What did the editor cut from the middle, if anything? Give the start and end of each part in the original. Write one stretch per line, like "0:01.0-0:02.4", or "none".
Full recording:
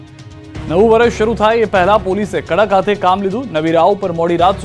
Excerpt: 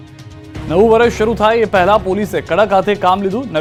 none

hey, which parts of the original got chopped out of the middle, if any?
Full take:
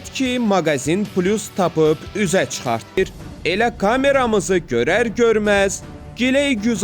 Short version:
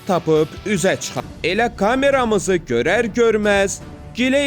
0:02.6-0:03.1

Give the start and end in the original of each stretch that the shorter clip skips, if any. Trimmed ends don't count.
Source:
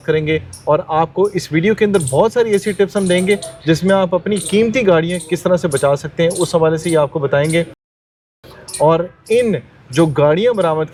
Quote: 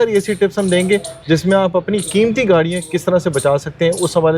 none

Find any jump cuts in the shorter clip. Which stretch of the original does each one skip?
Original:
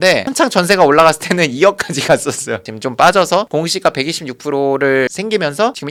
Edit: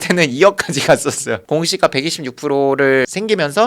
0:02.7-0:03.5

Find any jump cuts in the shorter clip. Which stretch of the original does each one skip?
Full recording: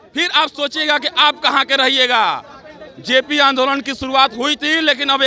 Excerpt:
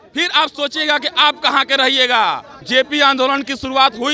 0:02.5-0:02.9

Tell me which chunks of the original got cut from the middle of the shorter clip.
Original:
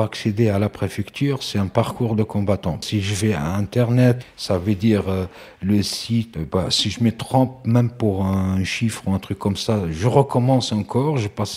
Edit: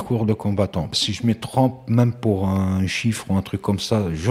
0:02.8-0:06.7

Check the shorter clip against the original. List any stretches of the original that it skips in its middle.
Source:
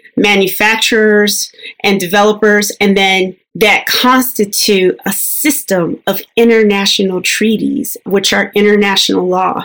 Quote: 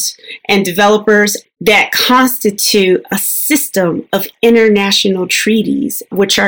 0:02.7-0:03.3

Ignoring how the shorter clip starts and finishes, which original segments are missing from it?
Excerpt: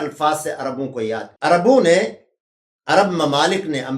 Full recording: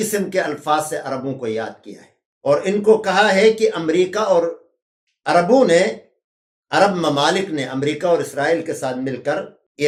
0:01.7-0:05.1

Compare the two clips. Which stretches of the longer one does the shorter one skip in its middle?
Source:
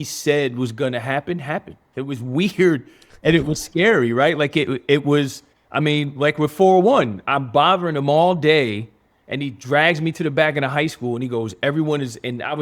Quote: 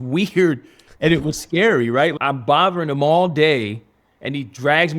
0:04.4-0:07.2

